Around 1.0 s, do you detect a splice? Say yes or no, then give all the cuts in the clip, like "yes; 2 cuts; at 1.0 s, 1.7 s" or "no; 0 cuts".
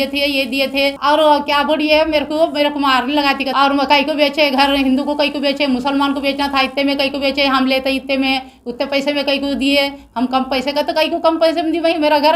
yes; 2 cuts; at 1.0 s, 3.5 s